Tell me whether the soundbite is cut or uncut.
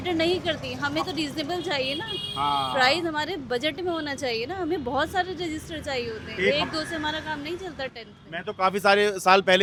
uncut